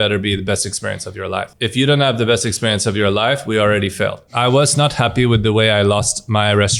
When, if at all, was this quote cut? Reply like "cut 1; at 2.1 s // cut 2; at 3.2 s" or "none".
cut 1; at 1.5 s // cut 2; at 4.2 s